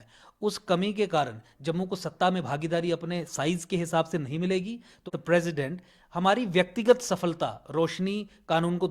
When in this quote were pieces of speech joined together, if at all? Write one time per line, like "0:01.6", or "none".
0:05.1